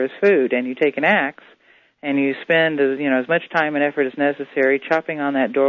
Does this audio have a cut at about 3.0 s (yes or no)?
yes